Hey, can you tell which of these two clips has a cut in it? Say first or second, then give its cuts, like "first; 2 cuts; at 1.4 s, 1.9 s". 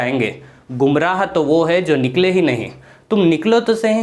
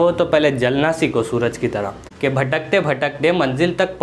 second; 1 cut; at 2.0 s